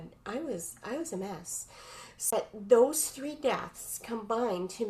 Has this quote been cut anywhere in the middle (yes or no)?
yes